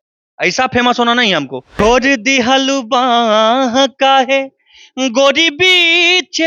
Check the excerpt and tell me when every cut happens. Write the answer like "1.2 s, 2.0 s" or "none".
1.8 s